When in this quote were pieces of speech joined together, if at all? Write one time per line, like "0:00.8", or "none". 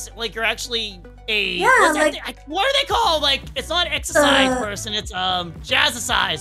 none